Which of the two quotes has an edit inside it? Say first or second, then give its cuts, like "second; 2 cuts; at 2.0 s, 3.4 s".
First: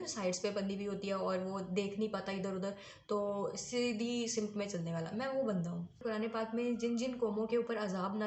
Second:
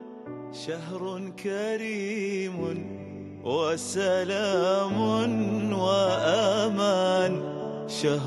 first; 1 cut; at 6.0 s